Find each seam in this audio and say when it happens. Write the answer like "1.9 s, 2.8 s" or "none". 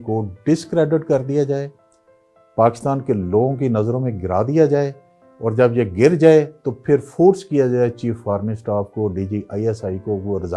none